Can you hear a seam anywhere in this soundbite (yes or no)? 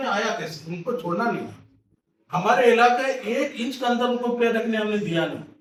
no